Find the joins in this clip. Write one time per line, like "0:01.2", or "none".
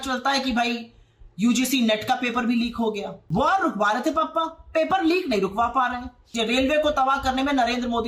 0:03.1
0:06.2